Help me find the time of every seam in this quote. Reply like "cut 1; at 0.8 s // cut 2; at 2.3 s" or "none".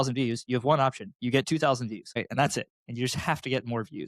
cut 1; at 2.2 s

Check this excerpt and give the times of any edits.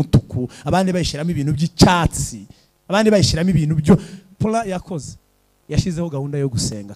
cut 1; at 4.3 s

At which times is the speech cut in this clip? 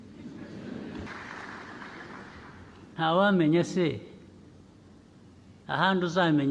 cut 1; at 1.1 s

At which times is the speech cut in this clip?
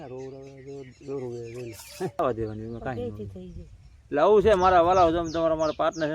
cut 1; at 2.2 s

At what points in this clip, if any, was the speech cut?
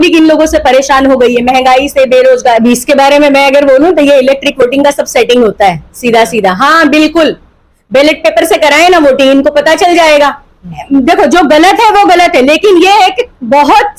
cut 1; at 2.6 s // cut 2; at 10.8 s

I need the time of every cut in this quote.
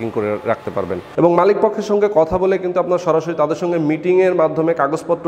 cut 1; at 1.0 s

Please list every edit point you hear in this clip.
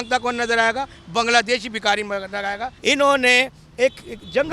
cut 1; at 2.7 s

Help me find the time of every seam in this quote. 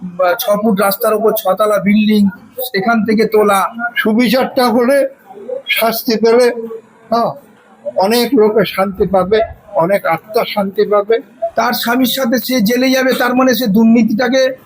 cut 1; at 3.8 s // cut 2; at 11.4 s

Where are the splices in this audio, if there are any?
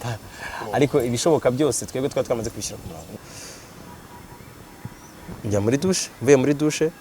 cut 1; at 3.2 s

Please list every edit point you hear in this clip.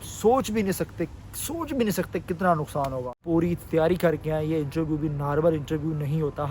cut 1; at 3.2 s

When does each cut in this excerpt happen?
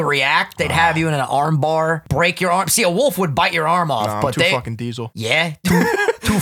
cut 1; at 2.0 s // cut 2; at 5.1 s

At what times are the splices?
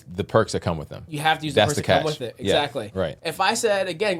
cut 1; at 3.2 s

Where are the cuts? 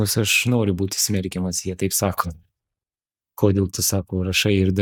none

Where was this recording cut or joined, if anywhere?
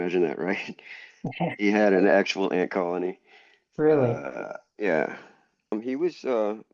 cut 1; at 5.7 s

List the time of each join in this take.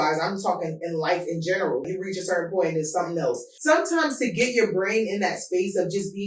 cut 1; at 1.9 s // cut 2; at 3.5 s

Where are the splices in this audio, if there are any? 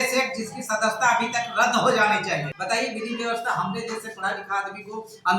cut 1; at 2.5 s

